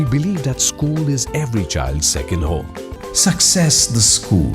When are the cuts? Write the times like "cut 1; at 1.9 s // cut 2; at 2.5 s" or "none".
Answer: cut 1; at 2.9 s